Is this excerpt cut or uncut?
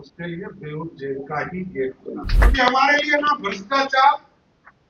cut